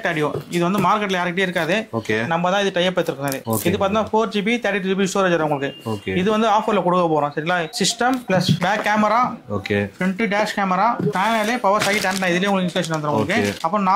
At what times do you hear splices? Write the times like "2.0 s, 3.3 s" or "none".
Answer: none